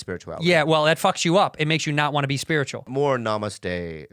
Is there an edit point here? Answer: yes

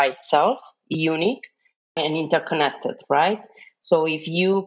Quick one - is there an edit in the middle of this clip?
yes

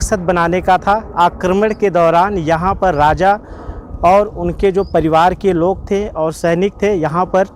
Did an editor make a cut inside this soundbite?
no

